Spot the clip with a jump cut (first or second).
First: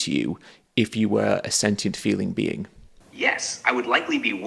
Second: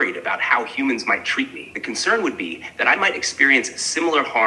second